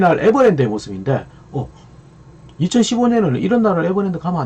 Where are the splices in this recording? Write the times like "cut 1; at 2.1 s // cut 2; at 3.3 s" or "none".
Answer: none